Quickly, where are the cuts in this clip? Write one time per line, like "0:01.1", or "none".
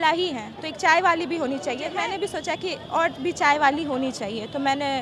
0:01.8